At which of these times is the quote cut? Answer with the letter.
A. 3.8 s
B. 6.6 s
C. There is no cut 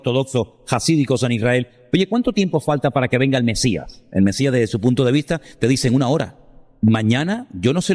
B